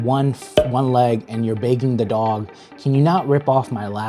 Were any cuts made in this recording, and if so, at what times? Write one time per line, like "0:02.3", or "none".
none